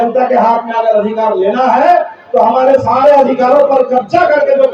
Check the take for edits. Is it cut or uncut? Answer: uncut